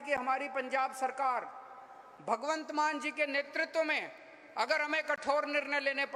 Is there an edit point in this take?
no; 0 cuts

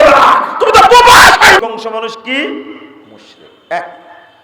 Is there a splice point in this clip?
yes; 1 cut; at 1.6 s

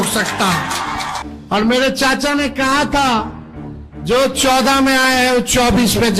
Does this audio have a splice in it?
yes; 1 cut; at 1.3 s

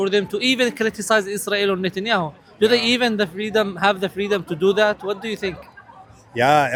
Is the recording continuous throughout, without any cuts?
yes; 0 cuts

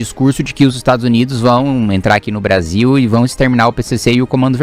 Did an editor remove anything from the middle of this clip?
no; 0 cuts

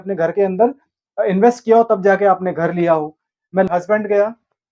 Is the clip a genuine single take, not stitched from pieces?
no; 1 cut; at 3.7 s

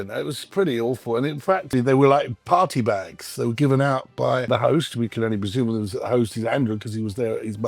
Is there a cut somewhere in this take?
yes; 2 cuts; at 1.7 s, 4.5 s

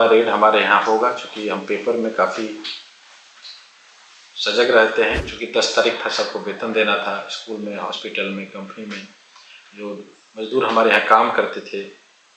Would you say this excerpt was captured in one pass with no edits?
no; 1 cut; at 5.3 s

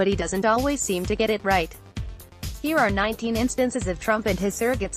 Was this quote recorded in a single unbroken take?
yes; 0 cuts

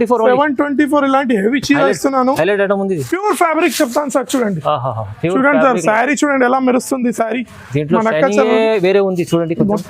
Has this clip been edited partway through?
yes; 1 cut; at 3.1 s

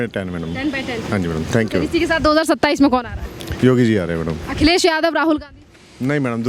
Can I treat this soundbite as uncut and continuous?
yes; 0 cuts

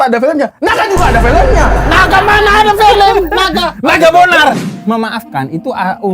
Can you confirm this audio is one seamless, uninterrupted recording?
no; 1 cut; at 4.7 s

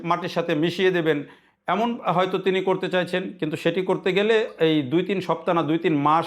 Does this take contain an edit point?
no; 0 cuts

